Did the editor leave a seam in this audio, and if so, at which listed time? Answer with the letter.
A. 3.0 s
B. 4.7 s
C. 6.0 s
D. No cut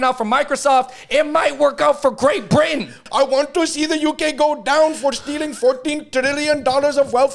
A